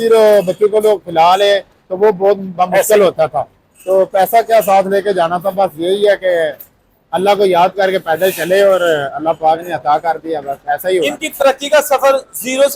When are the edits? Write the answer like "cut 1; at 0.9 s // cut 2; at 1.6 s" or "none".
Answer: cut 1; at 11.2 s